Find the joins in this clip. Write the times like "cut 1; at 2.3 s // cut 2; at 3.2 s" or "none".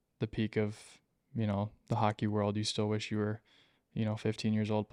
none